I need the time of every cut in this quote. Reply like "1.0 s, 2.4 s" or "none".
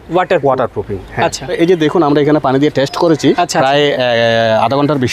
1.5 s, 3.4 s